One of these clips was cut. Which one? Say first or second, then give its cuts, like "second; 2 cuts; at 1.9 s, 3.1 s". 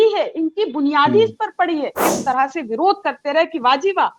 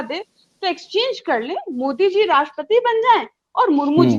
first; 1 cut; at 2.0 s